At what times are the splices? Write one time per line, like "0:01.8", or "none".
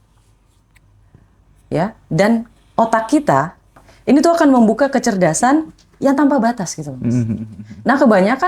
0:03.9